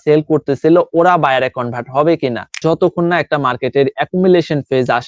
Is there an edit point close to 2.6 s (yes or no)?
yes